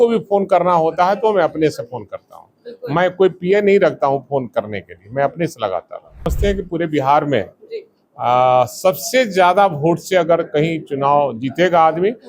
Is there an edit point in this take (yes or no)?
yes